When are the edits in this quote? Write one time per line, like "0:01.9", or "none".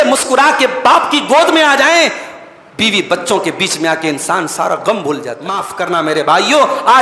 0:05.7